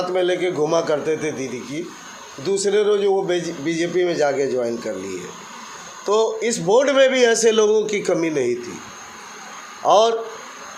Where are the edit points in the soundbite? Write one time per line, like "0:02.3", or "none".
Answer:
none